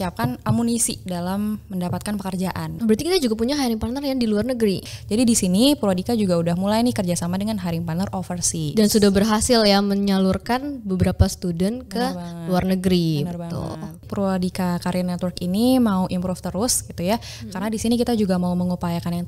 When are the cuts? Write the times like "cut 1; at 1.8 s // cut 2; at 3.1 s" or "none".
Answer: cut 1; at 2.7 s // cut 2; at 4.8 s // cut 3; at 14.0 s